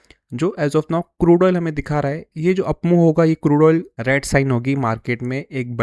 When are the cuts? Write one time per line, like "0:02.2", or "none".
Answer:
0:03.9